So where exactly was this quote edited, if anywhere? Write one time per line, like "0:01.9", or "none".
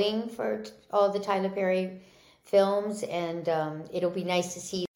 none